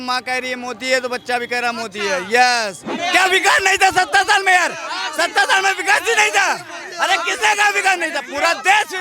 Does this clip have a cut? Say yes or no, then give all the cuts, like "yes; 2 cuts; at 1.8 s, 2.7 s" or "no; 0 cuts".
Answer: yes; 1 cut; at 2.9 s